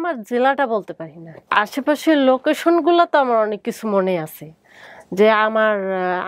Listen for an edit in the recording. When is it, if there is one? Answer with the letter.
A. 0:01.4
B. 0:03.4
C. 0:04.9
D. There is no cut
D